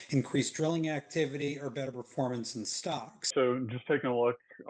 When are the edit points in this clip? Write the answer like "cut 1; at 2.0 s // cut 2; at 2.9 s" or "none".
cut 1; at 3.3 s